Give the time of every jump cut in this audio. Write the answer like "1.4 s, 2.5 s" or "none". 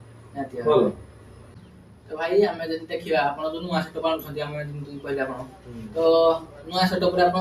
1.7 s